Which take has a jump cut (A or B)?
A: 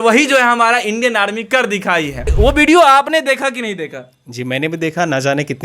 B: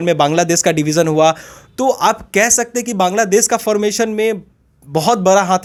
A